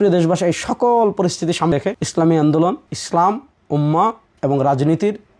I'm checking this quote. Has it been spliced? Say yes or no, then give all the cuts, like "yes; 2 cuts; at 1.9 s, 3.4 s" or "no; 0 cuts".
yes; 1 cut; at 1.7 s